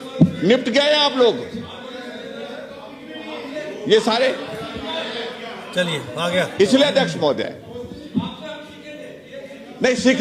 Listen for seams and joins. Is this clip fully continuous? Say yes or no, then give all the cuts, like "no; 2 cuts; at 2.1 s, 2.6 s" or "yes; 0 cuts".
yes; 0 cuts